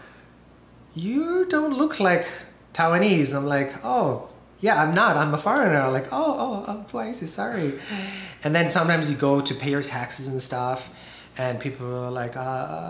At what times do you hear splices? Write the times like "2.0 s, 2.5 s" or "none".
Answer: none

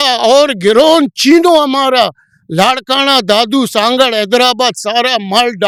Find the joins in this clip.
none

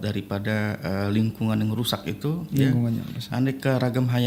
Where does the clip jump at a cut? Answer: none

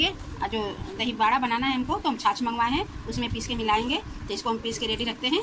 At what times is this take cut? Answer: none

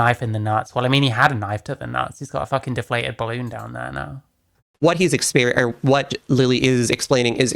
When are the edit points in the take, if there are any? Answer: 4.6 s

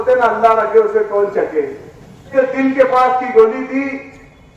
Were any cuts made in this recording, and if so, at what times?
2.3 s

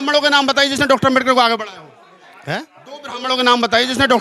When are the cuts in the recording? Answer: none

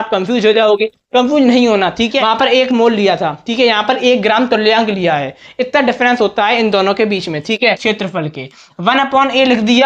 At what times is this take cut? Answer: 2.1 s, 7.8 s

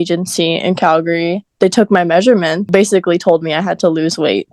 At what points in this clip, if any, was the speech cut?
1.4 s, 2.7 s

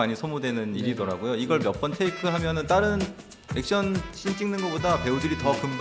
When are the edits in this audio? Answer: none

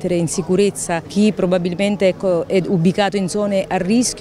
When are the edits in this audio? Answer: 1.1 s

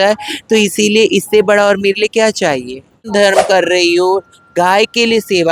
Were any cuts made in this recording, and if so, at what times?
3.1 s

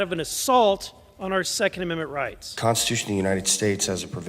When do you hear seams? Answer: 2.4 s

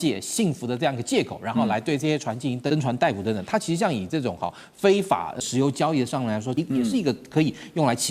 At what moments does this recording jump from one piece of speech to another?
2.7 s, 5.4 s, 6.5 s

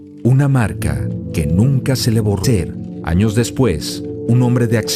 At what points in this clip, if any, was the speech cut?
none

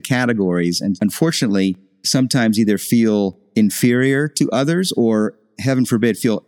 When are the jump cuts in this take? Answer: 1.0 s, 1.9 s, 3.4 s

